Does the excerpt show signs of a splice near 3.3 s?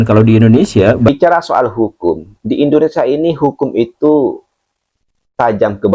no; 1 cut; at 1.1 s

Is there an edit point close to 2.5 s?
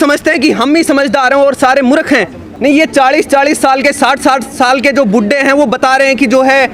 yes; 1 cut; at 2.5 s

